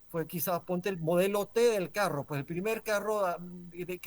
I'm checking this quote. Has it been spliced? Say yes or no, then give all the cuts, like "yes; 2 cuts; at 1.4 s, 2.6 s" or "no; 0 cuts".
no; 0 cuts